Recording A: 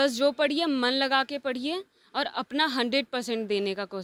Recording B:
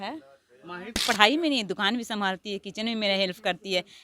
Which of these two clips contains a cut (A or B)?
B